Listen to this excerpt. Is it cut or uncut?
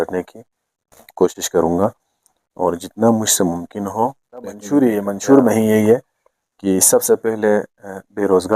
cut